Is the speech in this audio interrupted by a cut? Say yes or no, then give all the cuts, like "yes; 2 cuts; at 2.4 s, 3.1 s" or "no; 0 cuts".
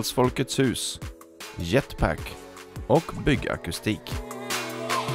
yes; 1 cut; at 4.1 s